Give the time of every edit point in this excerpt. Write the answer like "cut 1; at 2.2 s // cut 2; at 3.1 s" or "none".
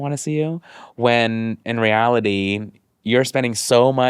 cut 1; at 1.6 s